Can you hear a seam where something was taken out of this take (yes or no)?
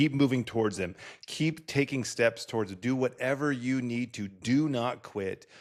no